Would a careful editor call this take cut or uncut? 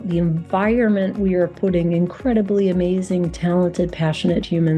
uncut